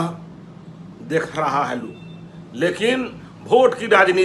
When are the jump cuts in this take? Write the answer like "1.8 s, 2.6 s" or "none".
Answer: none